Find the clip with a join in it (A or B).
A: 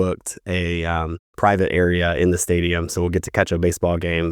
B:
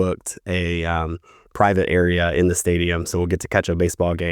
A